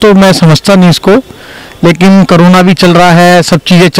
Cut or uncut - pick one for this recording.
uncut